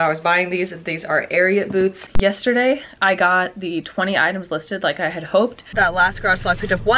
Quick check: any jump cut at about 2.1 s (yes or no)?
yes